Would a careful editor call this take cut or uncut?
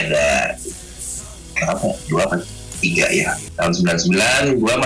cut